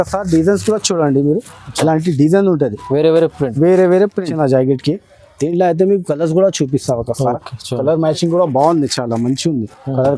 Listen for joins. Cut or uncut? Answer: cut